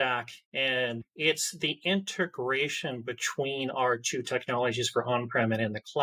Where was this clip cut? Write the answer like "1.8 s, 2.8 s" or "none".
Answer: 1.1 s